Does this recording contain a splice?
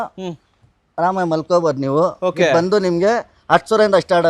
no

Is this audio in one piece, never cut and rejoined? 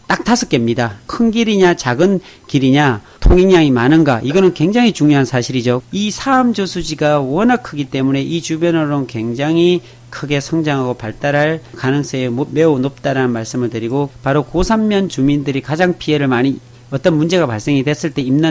no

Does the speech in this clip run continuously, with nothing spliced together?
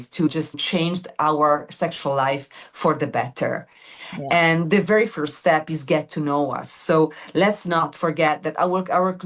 yes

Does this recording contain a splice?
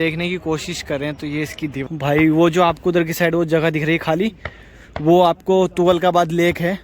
yes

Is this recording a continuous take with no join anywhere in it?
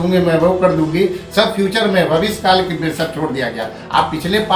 yes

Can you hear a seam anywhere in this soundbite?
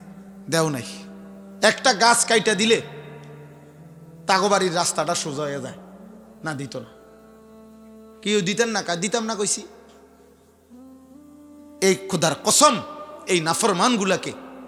no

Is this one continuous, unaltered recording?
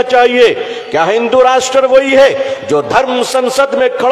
yes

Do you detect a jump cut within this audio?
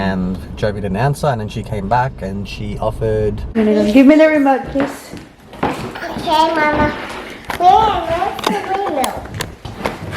yes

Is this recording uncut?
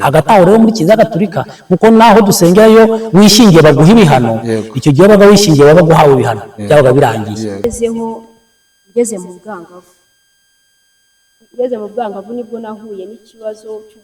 no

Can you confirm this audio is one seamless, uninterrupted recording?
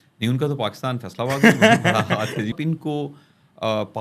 no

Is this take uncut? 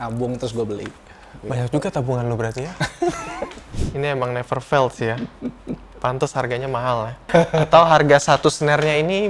no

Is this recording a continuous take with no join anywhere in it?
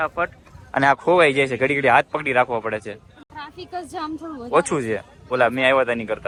yes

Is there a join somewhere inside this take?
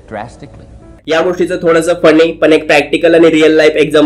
yes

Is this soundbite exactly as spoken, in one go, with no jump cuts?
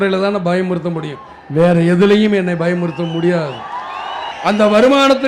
no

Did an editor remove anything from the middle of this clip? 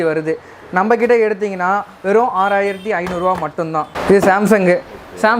yes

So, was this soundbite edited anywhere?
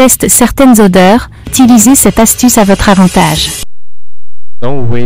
yes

